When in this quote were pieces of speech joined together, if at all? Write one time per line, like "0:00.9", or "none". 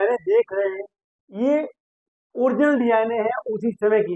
none